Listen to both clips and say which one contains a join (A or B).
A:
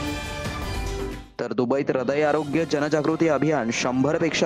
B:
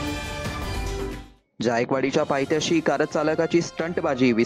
A